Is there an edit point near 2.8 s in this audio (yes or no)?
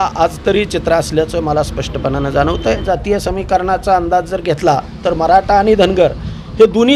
yes